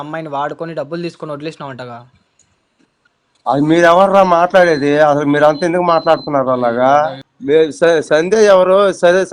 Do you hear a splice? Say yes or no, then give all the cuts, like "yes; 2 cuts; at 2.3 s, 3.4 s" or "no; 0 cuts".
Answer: yes; 1 cut; at 7.3 s